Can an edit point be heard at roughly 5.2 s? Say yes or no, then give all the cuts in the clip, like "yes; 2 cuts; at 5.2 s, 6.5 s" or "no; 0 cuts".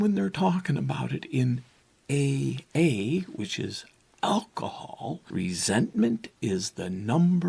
yes; 1 cut; at 5.2 s